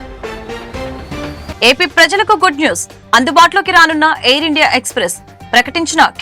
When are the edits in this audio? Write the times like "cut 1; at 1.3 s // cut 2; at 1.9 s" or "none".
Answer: cut 1; at 1.5 s